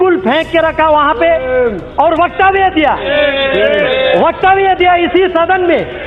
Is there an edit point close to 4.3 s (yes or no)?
no